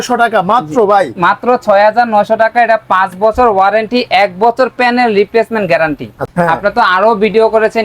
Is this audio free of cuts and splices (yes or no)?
no